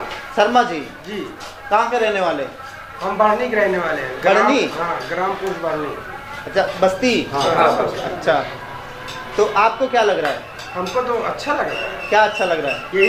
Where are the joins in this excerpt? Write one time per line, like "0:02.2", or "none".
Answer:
none